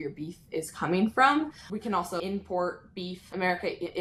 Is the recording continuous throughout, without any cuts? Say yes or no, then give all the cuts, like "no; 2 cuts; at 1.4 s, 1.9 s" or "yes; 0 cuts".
yes; 0 cuts